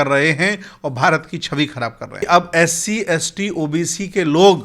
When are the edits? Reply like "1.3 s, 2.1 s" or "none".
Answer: 2.2 s